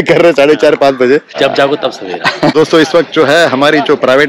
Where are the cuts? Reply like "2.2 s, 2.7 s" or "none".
1.3 s, 2.5 s